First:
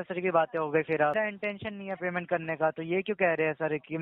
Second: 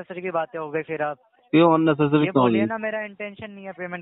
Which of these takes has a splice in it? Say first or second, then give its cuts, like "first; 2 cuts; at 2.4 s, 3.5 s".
first; 1 cut; at 1.3 s